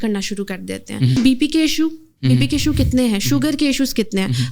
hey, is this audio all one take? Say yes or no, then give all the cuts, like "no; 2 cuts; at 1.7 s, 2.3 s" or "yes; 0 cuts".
no; 1 cut; at 1.2 s